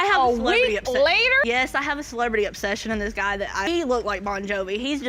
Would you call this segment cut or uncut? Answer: uncut